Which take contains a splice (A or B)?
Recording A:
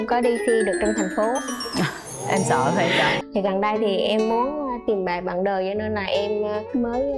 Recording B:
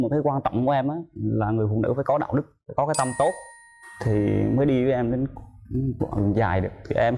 A